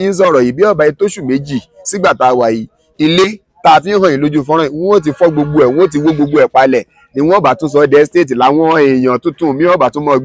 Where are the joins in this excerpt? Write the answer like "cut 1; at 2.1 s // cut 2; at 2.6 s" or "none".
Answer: none

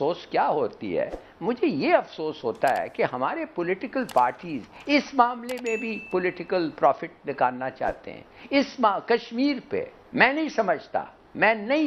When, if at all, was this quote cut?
none

